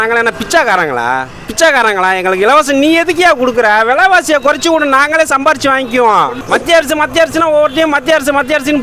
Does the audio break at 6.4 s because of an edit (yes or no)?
yes